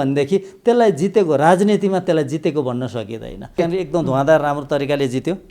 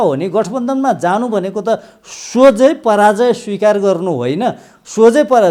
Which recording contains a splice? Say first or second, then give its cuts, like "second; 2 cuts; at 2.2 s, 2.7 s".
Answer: first; 1 cut; at 3.6 s